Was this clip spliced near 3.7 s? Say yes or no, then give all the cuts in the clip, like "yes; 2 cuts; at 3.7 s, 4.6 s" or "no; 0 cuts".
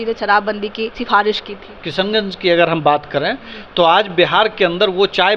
no; 2 cuts; at 1.0 s, 1.8 s